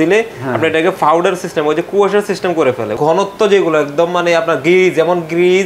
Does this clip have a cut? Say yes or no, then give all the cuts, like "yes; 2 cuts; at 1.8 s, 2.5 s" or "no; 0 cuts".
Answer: yes; 1 cut; at 2.9 s